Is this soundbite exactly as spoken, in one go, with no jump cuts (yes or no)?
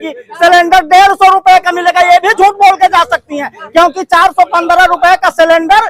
yes